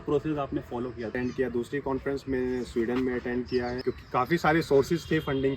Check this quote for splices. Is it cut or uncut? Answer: cut